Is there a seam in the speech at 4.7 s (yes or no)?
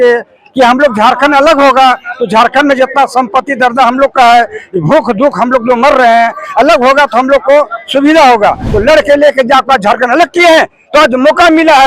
no